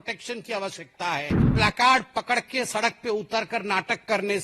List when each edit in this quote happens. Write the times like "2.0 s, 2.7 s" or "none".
1.5 s

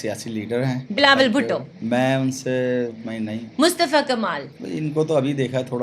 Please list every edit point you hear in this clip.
0.8 s, 1.7 s, 3.0 s, 4.5 s

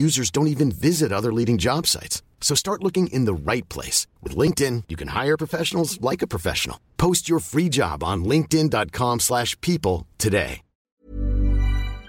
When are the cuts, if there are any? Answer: 11.0 s

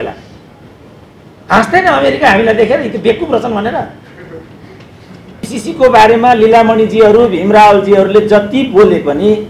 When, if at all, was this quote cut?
5.6 s

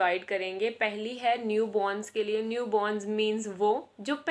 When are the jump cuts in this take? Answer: none

